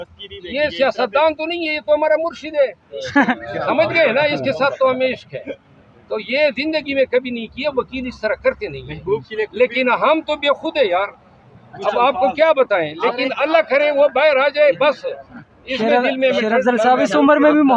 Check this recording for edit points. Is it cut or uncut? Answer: uncut